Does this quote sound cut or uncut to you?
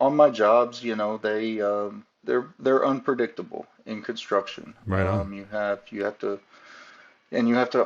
uncut